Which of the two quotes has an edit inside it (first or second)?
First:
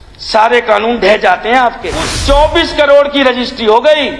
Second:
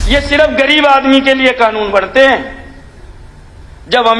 first